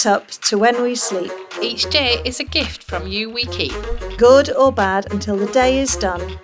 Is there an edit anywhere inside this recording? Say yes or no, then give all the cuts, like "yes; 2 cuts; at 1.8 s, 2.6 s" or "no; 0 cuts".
no; 0 cuts